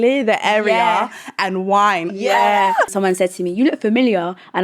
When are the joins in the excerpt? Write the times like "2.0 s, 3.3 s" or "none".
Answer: 2.9 s